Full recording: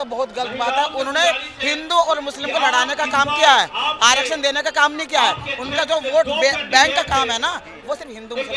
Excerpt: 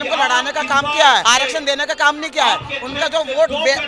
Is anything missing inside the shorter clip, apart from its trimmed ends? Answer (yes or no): yes